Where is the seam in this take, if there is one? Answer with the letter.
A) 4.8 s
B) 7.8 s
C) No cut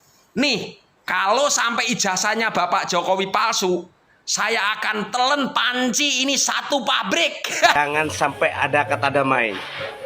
B